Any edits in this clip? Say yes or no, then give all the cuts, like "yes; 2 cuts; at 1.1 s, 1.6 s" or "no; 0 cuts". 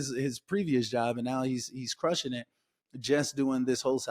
no; 0 cuts